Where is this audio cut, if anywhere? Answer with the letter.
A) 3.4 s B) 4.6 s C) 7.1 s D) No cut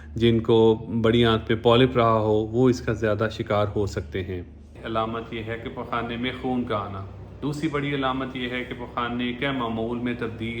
B